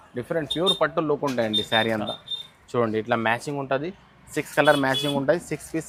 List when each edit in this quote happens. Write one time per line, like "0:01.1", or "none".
none

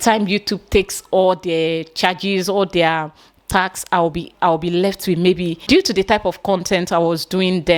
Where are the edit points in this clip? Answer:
0:05.6

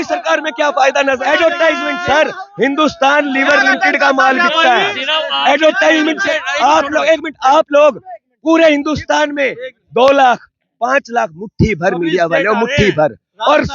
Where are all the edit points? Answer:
0:01.2
0:06.3

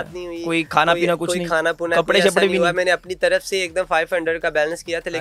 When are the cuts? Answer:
none

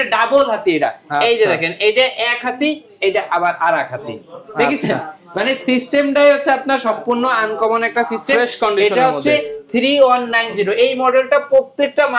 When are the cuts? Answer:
none

